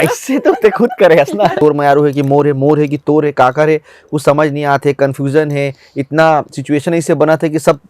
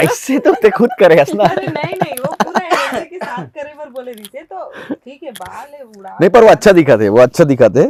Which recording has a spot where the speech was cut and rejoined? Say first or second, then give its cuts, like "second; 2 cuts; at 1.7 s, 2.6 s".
first; 1 cut; at 1.6 s